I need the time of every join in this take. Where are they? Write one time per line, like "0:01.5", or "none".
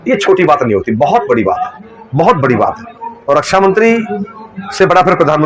none